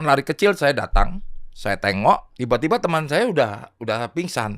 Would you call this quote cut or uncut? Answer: cut